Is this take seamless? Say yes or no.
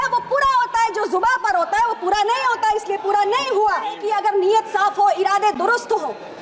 no